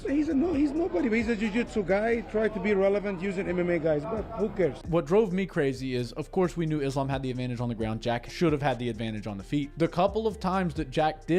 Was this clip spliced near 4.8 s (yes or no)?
yes